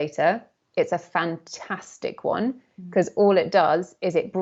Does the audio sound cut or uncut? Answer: uncut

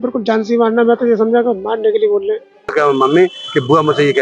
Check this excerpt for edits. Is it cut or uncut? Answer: cut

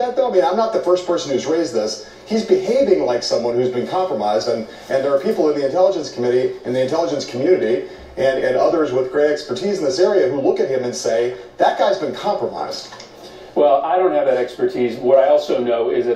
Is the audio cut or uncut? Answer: uncut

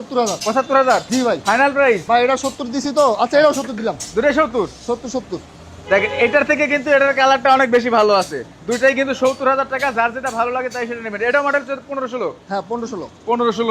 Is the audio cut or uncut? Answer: uncut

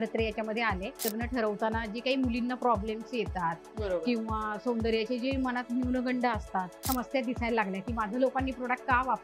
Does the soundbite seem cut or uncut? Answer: cut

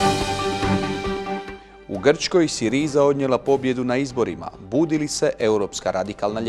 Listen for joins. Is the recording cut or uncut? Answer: uncut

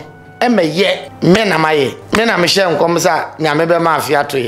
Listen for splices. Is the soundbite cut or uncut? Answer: cut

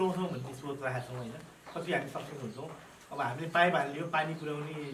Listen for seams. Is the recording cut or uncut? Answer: uncut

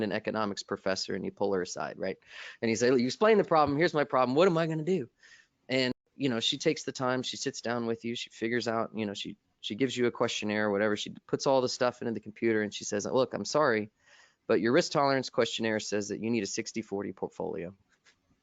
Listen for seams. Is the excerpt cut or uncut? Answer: cut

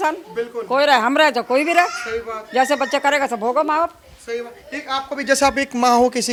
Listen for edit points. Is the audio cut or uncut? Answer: uncut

